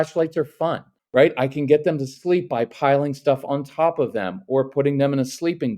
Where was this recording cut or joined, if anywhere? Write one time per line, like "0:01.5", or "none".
0:00.9